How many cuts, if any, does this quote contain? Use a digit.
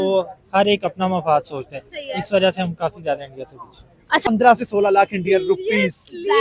1